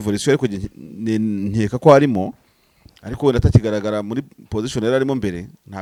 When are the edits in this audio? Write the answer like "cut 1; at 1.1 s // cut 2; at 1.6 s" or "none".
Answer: none

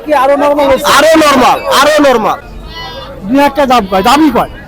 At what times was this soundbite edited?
cut 1; at 2.5 s

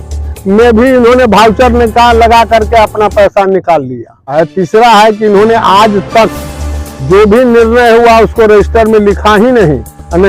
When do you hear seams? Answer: cut 1; at 4.3 s

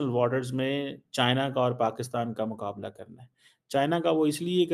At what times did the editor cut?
none

